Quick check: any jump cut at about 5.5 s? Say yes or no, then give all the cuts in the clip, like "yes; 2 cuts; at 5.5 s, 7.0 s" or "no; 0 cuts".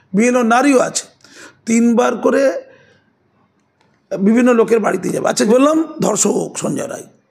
yes; 1 cut; at 5.5 s